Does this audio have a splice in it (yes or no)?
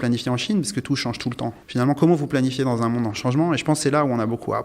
yes